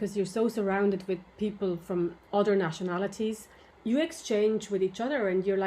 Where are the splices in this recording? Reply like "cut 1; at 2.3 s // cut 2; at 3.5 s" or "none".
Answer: cut 1; at 2.2 s // cut 2; at 3.7 s